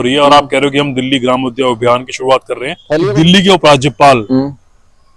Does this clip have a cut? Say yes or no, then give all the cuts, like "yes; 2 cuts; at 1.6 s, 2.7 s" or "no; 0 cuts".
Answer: no; 0 cuts